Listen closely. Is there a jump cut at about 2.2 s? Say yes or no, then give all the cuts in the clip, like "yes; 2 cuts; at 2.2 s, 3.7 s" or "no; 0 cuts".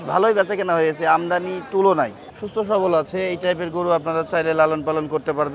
yes; 1 cut; at 2.2 s